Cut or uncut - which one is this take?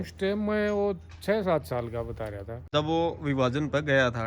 cut